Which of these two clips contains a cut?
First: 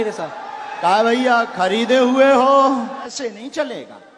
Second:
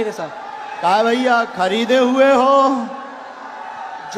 first; 1 cut; at 3.1 s

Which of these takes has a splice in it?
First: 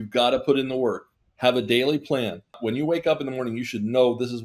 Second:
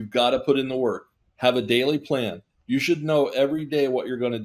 first; 1 cut; at 2.5 s

